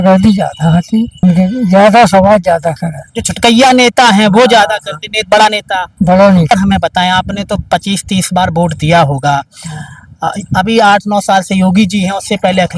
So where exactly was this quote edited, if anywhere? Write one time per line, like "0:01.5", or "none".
0:01.2
0:06.5